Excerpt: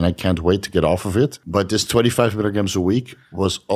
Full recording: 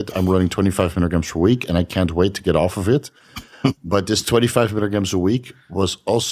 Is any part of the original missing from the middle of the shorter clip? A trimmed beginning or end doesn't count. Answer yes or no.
yes